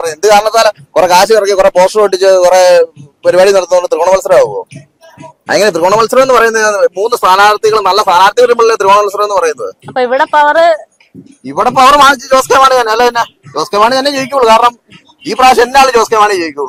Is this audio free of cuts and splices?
yes; 0 cuts

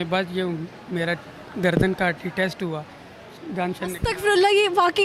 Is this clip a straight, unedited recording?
yes; 0 cuts

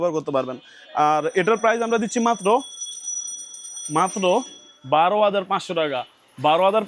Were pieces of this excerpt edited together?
no; 0 cuts

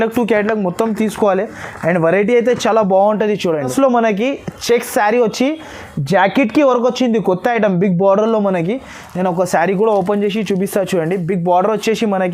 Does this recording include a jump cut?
yes; 1 cut; at 3.7 s

